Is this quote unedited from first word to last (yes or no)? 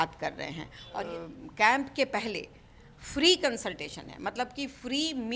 no